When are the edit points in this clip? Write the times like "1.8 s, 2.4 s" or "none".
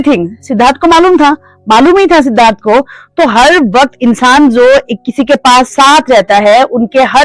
none